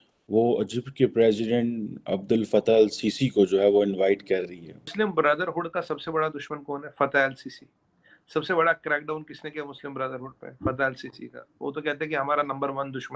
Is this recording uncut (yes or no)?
no